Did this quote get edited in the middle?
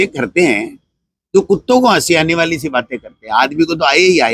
no; 0 cuts

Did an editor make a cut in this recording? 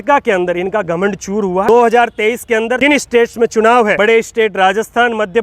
yes; 3 cuts; at 1.7 s, 2.8 s, 3.9 s

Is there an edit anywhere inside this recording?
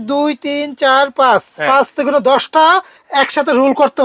yes; 1 cut; at 3.0 s

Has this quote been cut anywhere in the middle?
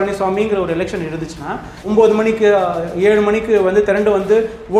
yes; 1 cut; at 1.8 s

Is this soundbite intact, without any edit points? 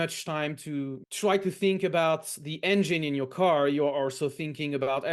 no; 1 cut; at 1.0 s

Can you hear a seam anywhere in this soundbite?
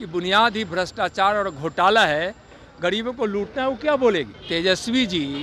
yes; 1 cut; at 4.4 s

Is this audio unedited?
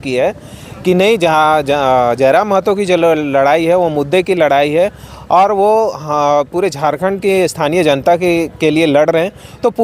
yes; 0 cuts

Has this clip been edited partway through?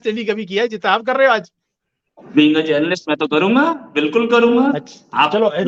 no; 0 cuts

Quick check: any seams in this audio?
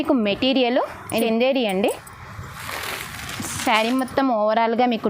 yes; 1 cut; at 1.1 s

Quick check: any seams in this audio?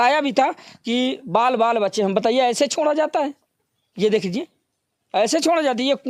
no; 0 cuts

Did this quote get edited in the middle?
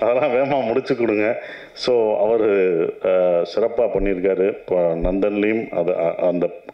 no; 0 cuts

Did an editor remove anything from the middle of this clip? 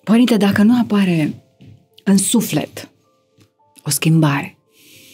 no; 0 cuts

